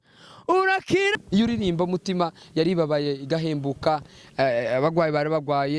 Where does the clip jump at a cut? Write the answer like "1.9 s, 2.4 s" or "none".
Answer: 1.1 s